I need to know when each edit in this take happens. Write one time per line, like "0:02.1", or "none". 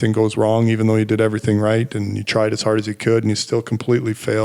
none